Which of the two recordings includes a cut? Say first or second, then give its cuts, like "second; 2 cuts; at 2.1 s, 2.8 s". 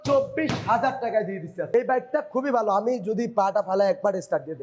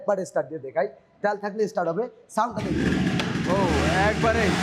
first; 1 cut; at 1.7 s